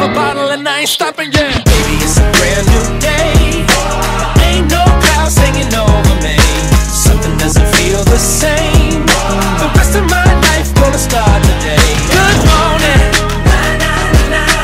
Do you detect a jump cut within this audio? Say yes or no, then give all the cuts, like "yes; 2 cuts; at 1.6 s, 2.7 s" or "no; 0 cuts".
no; 0 cuts